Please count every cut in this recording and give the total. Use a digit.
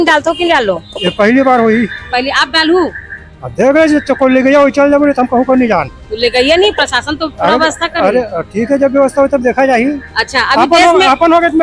0